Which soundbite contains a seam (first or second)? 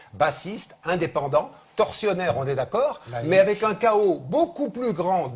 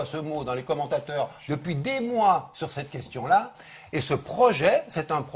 first